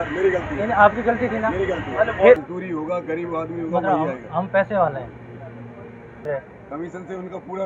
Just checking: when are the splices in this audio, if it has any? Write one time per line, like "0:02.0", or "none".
0:02.4
0:06.2